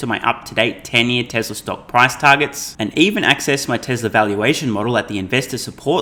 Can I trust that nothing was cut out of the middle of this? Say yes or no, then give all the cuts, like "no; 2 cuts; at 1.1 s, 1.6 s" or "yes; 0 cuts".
yes; 0 cuts